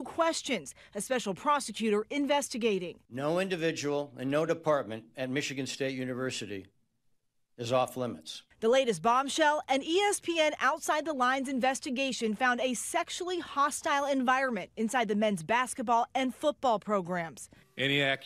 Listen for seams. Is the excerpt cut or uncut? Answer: uncut